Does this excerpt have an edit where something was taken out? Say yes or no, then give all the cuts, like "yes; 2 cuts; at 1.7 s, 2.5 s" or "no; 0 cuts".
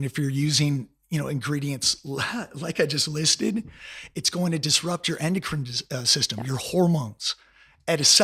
no; 0 cuts